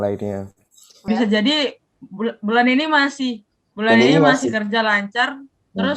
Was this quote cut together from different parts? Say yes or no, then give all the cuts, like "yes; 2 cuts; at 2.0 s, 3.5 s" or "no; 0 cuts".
yes; 1 cut; at 1.0 s